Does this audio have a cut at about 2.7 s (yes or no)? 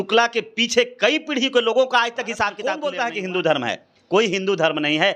yes